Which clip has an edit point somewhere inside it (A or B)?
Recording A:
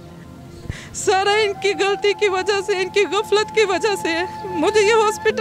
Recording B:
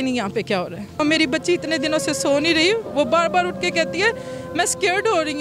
B